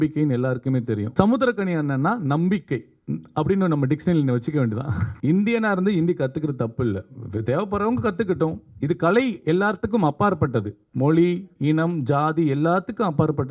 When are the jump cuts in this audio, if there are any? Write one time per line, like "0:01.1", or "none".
0:01.1
0:05.0